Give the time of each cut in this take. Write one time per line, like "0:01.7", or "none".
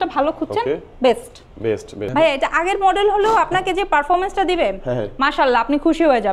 0:02.0